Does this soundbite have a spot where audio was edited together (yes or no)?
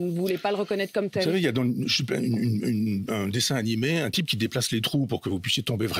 no